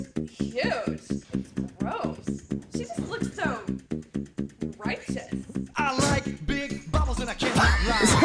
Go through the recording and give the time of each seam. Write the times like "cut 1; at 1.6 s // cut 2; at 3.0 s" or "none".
none